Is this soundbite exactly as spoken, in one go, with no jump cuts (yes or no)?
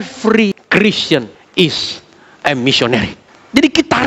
no